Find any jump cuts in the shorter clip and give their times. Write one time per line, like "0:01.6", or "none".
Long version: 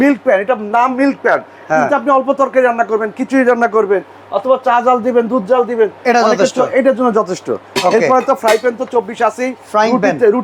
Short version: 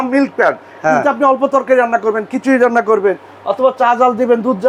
none